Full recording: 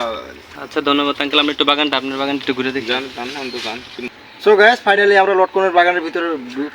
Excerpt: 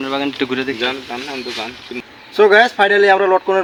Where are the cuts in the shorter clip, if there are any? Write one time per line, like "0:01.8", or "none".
none